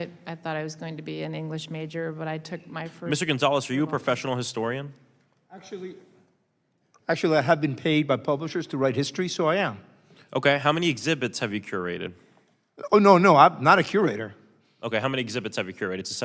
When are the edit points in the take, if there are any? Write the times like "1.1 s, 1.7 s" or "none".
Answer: 3.0 s